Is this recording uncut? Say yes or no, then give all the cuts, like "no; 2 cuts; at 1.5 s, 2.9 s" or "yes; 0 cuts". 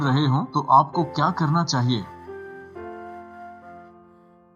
yes; 0 cuts